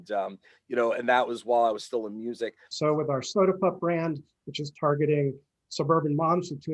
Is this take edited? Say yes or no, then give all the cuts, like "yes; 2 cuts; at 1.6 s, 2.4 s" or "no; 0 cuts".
yes; 1 cut; at 2.6 s